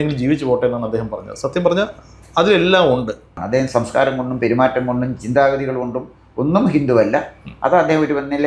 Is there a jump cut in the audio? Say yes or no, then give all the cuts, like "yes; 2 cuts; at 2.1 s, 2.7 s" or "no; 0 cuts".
yes; 1 cut; at 3.4 s